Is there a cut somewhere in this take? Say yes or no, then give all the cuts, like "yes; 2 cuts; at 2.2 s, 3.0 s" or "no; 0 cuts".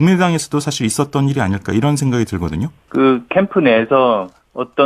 yes; 1 cut; at 2.8 s